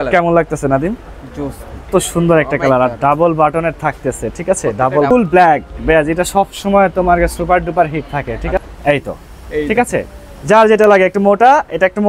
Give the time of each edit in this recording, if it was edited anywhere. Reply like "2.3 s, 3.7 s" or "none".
1.9 s, 5.1 s, 8.6 s